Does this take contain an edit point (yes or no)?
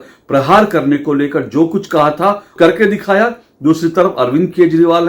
yes